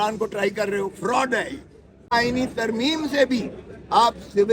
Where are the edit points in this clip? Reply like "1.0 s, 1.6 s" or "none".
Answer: 2.1 s